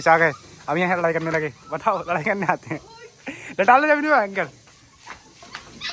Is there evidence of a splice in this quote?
no; 0 cuts

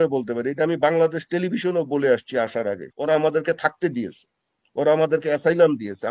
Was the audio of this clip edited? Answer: yes; 1 cut; at 2.9 s

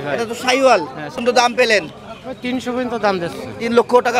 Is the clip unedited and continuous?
no; 1 cut; at 1.2 s

